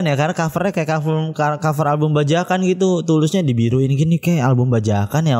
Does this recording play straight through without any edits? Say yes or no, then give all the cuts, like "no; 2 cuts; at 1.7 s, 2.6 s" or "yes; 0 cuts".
yes; 0 cuts